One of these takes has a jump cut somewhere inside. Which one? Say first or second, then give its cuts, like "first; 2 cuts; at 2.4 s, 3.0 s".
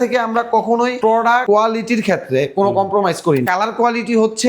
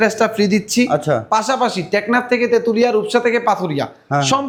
first; 2 cuts; at 1.3 s, 3.5 s